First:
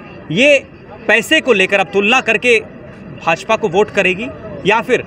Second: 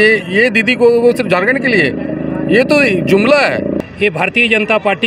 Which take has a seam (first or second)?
second